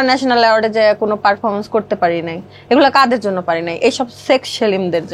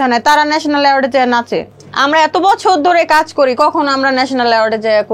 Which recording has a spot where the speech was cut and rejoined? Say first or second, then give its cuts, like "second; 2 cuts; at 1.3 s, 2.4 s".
second; 1 cut; at 1.8 s